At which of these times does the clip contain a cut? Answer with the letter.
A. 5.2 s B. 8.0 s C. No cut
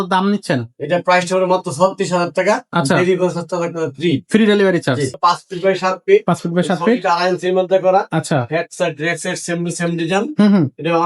A